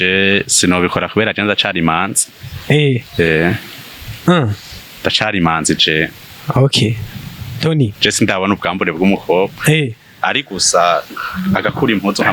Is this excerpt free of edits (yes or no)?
yes